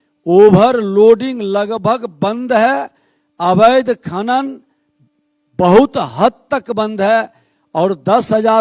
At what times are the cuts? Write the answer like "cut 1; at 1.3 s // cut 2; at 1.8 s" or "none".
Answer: none